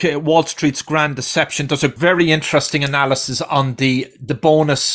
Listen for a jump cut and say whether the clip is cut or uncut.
cut